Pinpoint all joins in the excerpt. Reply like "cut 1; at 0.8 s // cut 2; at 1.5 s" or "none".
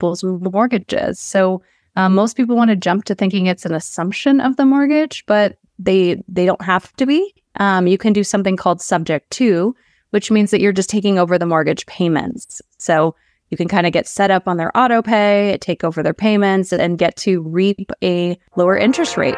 cut 1; at 5.7 s // cut 2; at 18.4 s